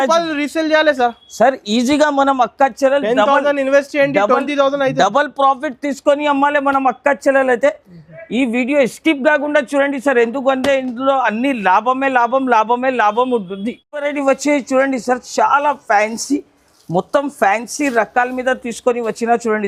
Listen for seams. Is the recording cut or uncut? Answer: uncut